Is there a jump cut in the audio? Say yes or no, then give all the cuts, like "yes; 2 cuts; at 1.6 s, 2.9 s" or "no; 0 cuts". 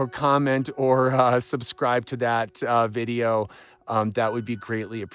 no; 0 cuts